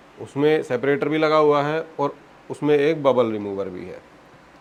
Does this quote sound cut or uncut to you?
uncut